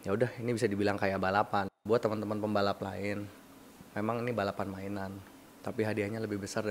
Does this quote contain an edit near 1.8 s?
yes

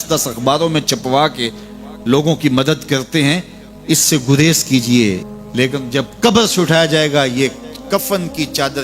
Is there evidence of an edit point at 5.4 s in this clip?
yes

